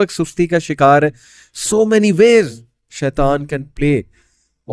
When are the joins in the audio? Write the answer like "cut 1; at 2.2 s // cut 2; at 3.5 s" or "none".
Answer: none